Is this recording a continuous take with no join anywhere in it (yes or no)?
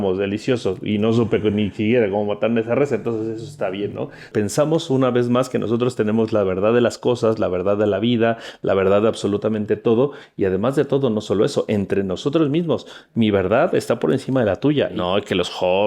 no